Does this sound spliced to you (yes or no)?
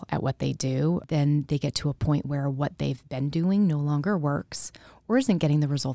yes